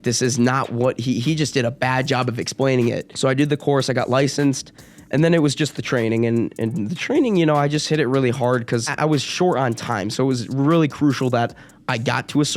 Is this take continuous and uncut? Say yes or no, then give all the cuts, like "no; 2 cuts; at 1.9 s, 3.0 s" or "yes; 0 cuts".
no; 2 cuts; at 3.1 s, 8.9 s